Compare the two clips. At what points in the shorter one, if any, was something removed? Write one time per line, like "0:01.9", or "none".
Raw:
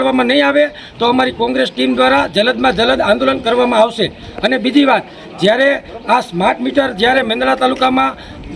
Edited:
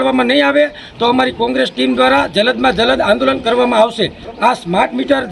0:04.2